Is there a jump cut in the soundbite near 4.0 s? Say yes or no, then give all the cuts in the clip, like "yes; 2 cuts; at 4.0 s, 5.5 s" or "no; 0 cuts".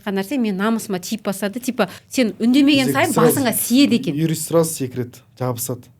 no; 1 cut; at 2.0 s